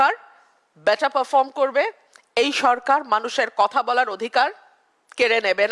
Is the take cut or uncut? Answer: uncut